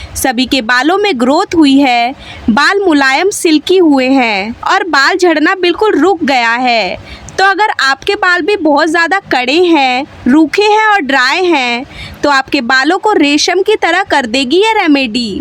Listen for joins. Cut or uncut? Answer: cut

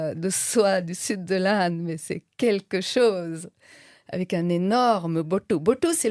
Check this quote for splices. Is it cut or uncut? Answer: uncut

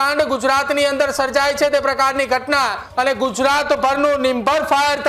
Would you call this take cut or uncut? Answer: cut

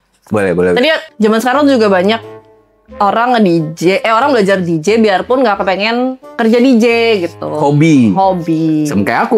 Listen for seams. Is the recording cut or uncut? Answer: cut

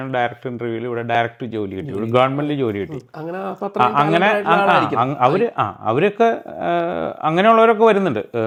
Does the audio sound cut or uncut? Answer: uncut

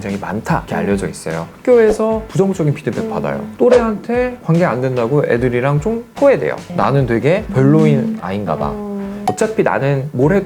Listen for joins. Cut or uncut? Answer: cut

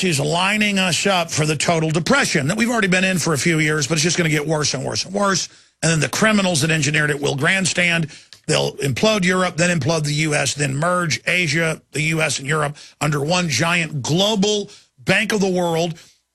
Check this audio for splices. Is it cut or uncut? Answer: cut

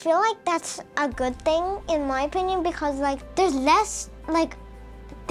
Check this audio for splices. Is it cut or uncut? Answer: uncut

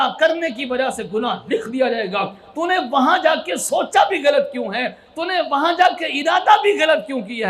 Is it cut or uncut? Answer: uncut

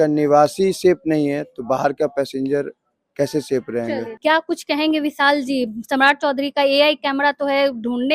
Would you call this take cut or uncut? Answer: cut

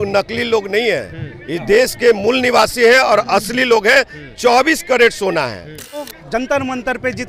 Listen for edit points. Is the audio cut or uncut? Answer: cut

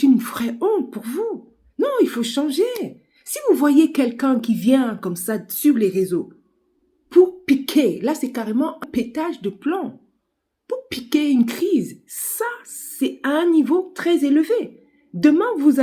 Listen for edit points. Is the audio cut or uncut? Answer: cut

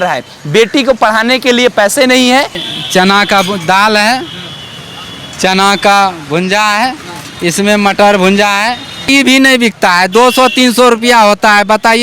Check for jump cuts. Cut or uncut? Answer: cut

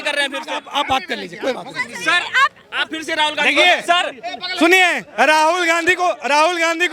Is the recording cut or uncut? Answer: uncut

